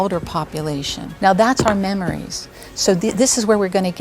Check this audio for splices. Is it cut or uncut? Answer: cut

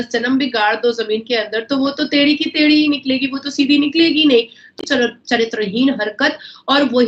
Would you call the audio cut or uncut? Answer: cut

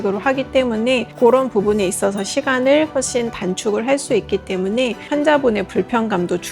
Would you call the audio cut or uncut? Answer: cut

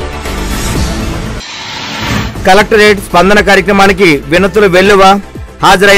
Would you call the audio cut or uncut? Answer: cut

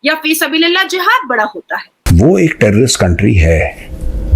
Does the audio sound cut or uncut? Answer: cut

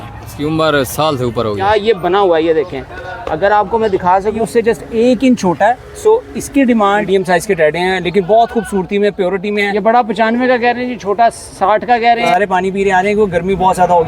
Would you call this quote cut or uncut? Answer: cut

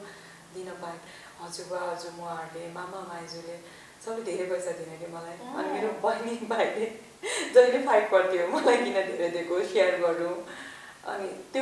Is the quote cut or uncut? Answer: cut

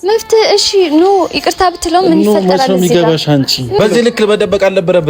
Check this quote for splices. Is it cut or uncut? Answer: cut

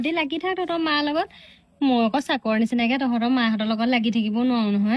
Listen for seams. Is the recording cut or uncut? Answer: uncut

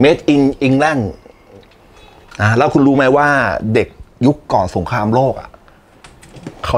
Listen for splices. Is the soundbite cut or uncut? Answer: uncut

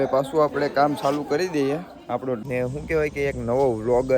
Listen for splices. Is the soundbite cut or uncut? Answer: cut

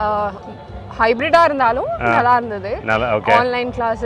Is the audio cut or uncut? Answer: uncut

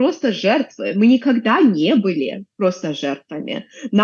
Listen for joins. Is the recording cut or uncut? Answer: uncut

